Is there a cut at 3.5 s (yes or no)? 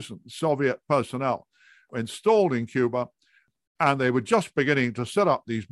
yes